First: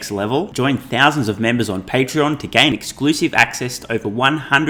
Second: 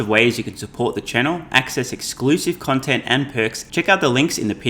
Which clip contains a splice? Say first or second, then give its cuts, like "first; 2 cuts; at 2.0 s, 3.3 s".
second; 1 cut; at 3.6 s